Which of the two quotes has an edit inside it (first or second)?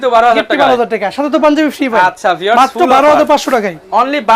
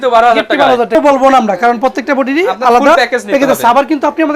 second